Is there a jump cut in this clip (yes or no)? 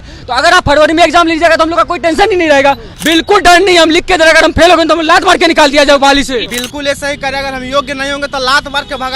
yes